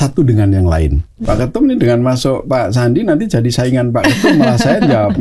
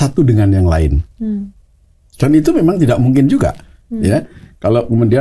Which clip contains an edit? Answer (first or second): first